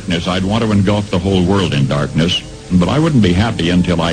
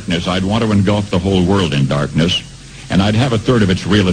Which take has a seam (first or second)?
first